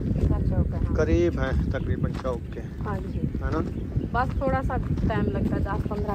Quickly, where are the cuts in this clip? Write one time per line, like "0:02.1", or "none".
none